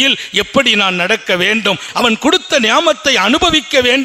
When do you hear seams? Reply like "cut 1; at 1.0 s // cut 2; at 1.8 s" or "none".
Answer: cut 1; at 1.9 s